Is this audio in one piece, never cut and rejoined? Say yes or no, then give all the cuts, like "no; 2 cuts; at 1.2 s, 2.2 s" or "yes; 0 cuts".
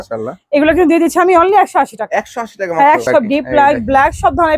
no; 1 cut; at 3.0 s